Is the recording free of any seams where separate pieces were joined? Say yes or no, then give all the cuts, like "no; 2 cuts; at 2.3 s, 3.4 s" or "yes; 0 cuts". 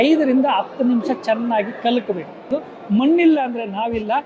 no; 1 cut; at 2.4 s